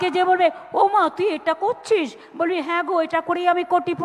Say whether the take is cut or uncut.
uncut